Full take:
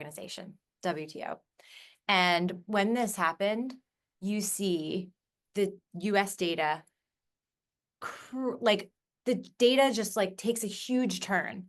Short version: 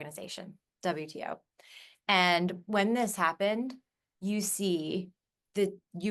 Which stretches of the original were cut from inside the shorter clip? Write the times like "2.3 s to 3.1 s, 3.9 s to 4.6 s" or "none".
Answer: none